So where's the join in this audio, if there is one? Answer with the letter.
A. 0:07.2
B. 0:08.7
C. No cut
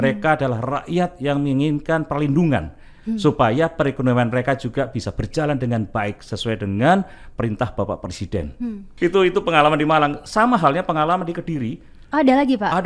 C